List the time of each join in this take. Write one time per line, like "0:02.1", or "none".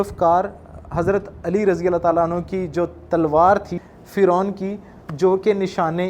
0:03.7

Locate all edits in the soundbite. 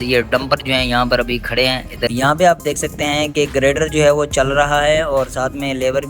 0:02.1

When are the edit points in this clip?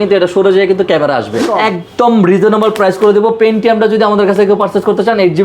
0:01.5

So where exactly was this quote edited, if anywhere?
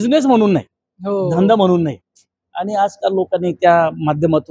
none

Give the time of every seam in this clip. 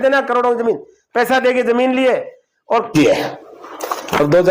0:02.9

